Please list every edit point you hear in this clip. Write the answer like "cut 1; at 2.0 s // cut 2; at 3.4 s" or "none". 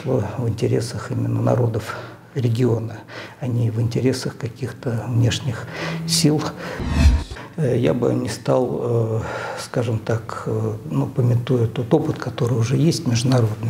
cut 1; at 7.1 s